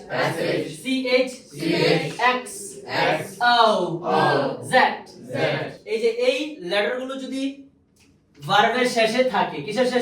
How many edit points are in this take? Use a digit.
1